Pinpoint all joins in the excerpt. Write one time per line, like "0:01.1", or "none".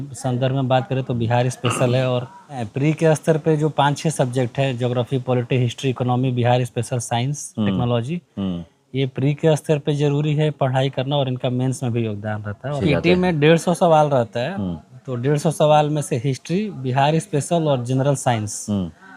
0:02.7
0:12.7